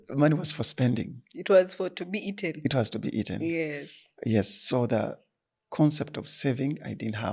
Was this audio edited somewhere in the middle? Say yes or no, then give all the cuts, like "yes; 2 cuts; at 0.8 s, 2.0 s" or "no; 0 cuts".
no; 0 cuts